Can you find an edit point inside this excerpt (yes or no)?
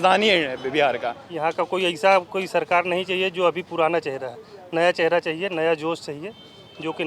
yes